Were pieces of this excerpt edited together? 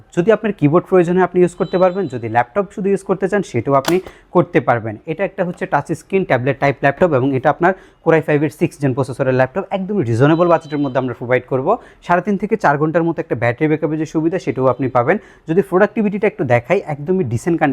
no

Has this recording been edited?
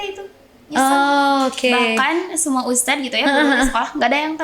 no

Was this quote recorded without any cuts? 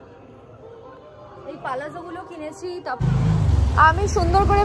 no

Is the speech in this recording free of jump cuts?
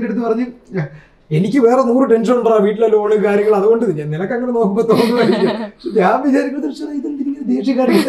yes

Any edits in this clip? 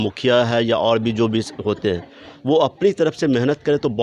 no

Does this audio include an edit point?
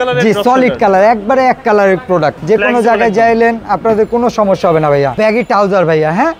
yes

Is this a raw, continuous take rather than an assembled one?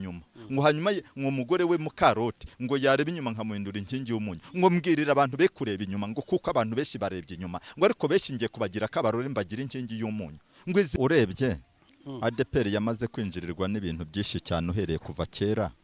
no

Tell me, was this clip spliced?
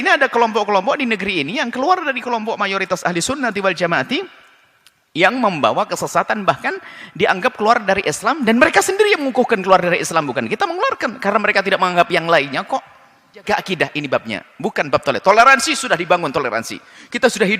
yes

